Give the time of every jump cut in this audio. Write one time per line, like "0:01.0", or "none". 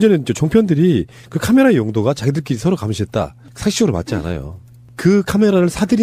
none